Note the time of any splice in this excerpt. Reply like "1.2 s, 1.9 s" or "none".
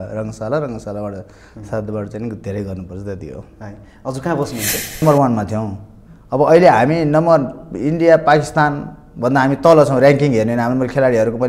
5.0 s